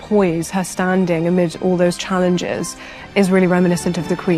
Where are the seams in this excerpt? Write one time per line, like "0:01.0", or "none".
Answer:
none